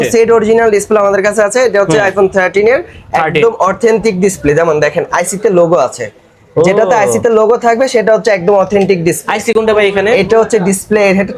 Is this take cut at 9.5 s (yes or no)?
no